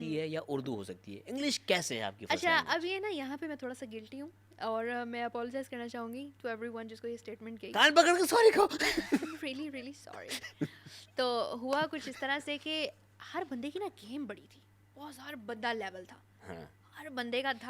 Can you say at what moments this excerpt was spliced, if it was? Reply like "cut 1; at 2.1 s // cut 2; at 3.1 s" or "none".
none